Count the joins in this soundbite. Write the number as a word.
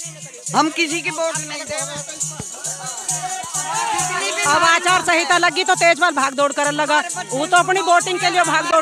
zero